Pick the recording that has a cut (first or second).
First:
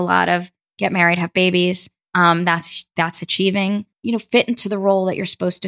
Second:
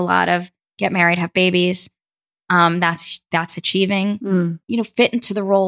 first